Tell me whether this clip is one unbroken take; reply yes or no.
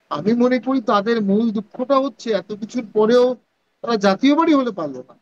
yes